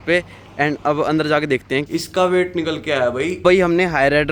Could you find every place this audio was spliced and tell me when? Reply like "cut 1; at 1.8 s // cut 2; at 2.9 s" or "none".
cut 1; at 1.9 s // cut 2; at 3.4 s